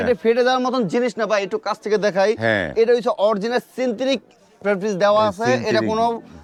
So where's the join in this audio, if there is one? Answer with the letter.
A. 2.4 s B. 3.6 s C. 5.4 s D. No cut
D